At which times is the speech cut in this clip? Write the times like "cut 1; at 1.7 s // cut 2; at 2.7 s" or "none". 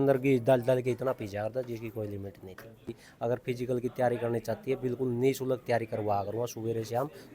cut 1; at 3.0 s